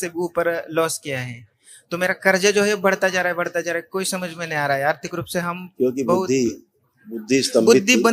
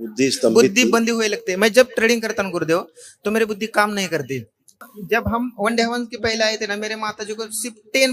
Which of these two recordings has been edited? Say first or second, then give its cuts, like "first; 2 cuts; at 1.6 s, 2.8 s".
second; 1 cut; at 5.0 s